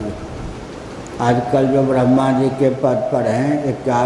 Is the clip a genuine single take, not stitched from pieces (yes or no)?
yes